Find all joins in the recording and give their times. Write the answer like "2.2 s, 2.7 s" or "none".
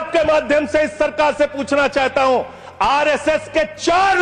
none